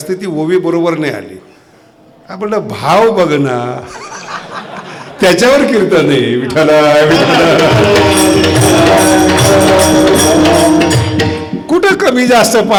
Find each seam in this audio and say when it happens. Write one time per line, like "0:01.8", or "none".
none